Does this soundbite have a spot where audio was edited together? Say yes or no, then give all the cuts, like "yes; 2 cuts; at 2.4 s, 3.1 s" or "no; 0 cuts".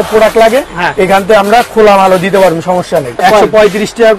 yes; 1 cut; at 3.1 s